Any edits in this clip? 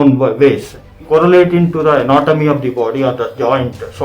yes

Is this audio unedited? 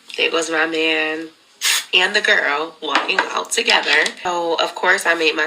no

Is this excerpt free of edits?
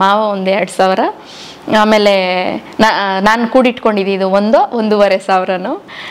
yes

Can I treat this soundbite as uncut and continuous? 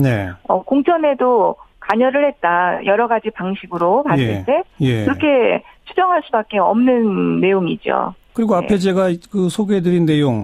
no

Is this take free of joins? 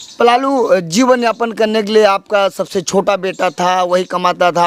yes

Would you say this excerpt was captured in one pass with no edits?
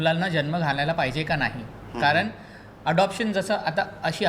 yes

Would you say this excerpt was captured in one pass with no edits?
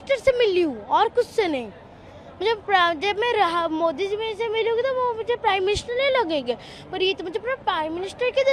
yes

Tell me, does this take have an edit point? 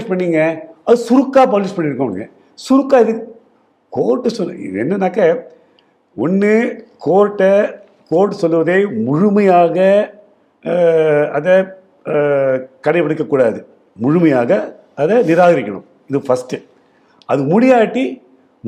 no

